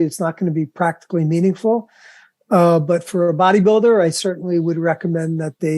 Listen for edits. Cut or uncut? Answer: uncut